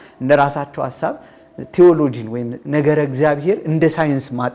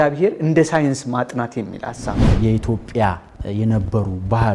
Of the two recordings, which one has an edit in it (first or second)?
second